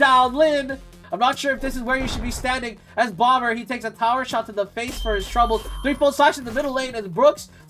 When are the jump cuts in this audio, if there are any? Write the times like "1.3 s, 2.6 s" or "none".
1.0 s